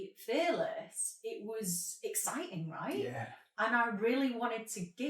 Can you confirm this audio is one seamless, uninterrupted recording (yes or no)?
yes